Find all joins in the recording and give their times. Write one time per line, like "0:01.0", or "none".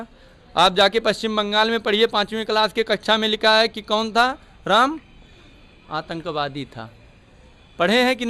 none

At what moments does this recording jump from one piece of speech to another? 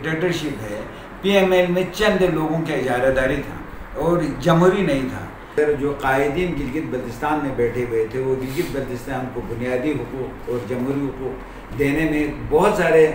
0:05.6

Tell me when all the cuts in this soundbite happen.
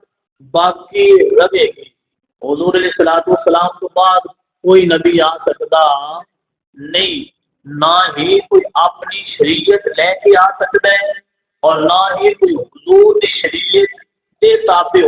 none

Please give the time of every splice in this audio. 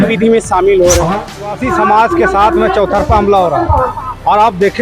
0:01.4

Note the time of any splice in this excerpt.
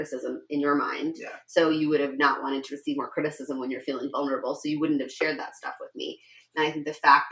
none

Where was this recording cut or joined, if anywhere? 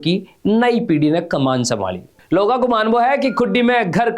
0:02.1

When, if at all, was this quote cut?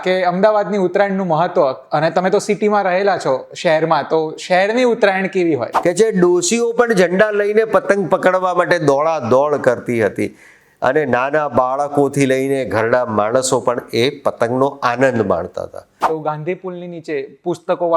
0:05.7
0:16.0

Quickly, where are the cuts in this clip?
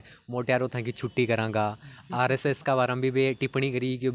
none

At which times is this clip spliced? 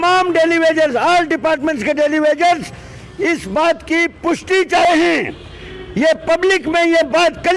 none

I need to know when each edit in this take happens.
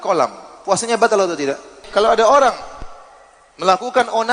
0:01.9

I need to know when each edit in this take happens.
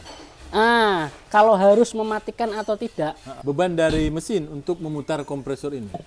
0:03.3

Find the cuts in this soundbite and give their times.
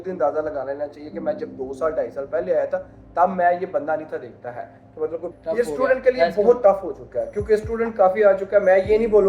0:05.3

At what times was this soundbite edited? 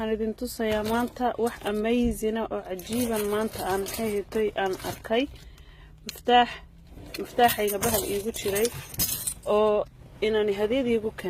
none

